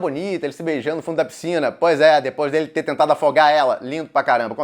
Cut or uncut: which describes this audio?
uncut